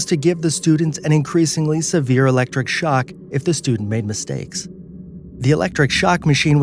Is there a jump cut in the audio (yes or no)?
yes